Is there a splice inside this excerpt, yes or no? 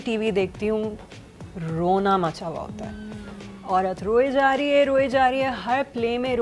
no